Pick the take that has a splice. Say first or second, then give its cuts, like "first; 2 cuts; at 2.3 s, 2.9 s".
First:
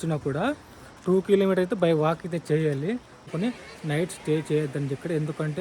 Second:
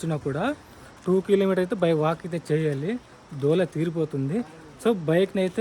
first; 1 cut; at 3.3 s